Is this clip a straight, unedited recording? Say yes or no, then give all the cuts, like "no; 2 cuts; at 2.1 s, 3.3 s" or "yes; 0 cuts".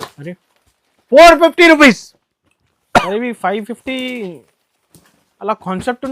yes; 0 cuts